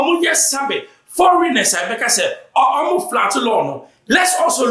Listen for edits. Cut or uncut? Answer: uncut